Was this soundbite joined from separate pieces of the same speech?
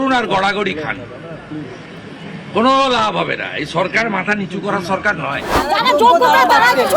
yes; 1 cut; at 5.6 s

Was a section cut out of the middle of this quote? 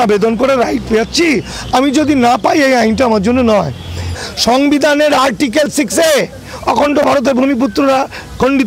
yes; 1 cut; at 4.1 s

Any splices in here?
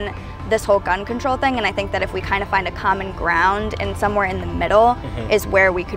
no; 0 cuts

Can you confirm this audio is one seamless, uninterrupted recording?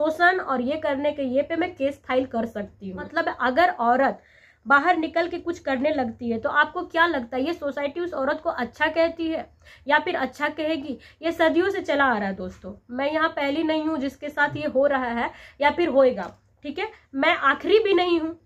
no; 1 cut; at 3.1 s

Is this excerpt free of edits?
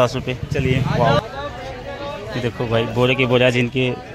no; 1 cut; at 1.2 s

